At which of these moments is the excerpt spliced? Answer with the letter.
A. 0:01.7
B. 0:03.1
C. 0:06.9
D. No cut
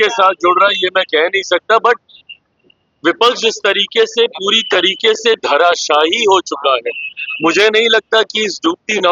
D